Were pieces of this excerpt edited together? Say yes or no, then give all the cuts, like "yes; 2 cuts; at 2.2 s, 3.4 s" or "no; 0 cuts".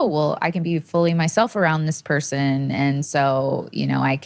no; 0 cuts